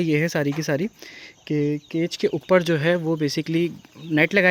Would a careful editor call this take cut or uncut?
uncut